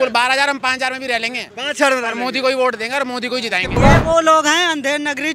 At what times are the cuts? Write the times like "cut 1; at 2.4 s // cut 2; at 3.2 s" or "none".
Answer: cut 1; at 3.8 s